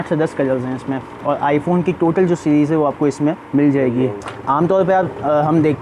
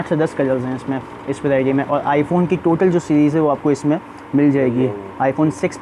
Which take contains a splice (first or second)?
first